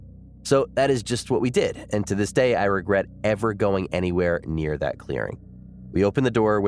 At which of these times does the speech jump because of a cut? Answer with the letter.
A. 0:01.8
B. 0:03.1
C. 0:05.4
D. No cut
D